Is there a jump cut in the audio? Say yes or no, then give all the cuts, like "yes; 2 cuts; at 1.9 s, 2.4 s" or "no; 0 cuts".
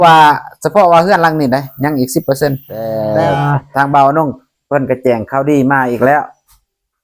yes; 1 cut; at 2.9 s